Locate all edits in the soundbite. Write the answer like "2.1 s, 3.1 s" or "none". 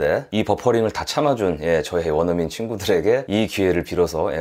none